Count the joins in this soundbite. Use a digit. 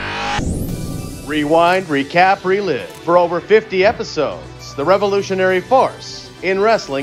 0